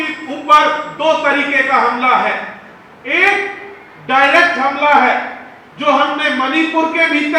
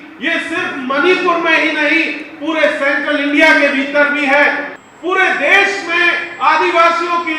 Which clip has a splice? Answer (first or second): second